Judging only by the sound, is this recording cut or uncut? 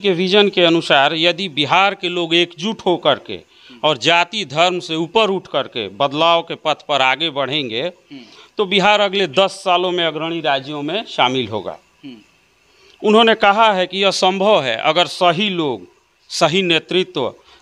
uncut